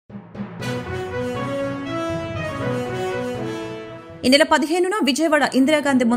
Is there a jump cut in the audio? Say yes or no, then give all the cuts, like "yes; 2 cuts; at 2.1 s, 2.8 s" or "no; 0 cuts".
yes; 2 cuts; at 3.2 s, 4.0 s